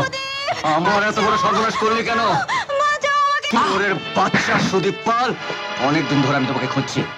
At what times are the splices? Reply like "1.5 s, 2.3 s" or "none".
3.4 s